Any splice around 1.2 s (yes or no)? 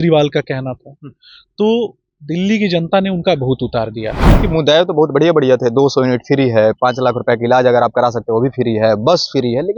no